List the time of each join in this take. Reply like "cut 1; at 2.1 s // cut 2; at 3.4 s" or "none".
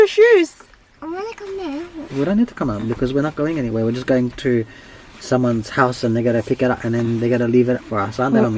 none